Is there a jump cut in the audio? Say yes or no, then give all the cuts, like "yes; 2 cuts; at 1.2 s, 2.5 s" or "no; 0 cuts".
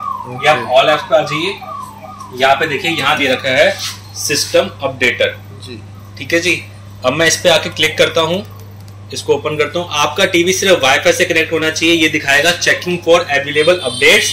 no; 0 cuts